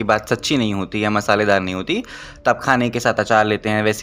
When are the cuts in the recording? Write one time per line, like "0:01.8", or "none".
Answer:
none

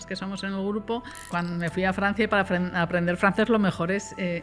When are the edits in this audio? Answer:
0:01.3

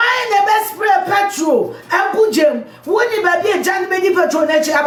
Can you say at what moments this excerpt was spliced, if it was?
none

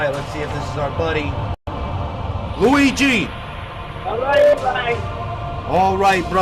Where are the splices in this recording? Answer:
0:03.0

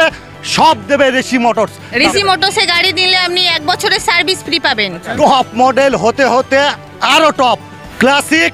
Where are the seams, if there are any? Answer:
0:01.9
0:05.1

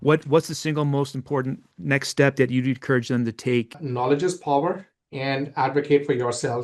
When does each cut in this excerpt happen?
0:03.8

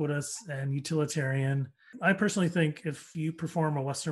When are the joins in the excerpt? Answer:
0:01.9
0:03.1

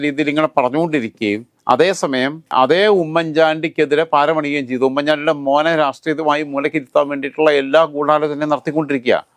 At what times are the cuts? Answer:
none

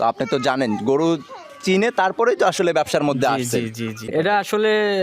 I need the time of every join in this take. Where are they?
0:04.1

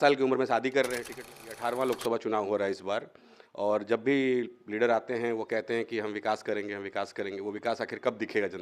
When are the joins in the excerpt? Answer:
0:01.3

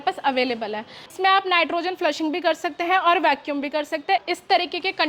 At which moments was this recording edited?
0:01.0
0:04.3

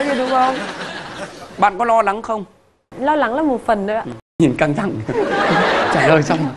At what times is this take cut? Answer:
0:02.9
0:04.4

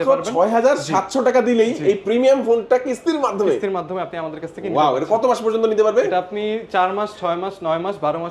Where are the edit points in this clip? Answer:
none

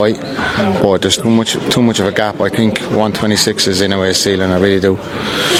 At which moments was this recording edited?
none

